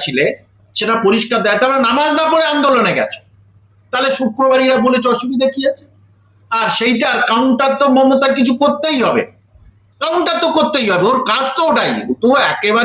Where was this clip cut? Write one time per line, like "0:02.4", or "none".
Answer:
none